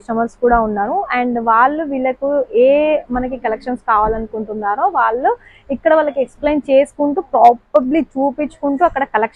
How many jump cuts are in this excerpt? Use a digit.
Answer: 0